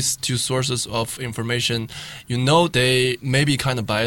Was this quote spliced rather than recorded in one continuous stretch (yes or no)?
yes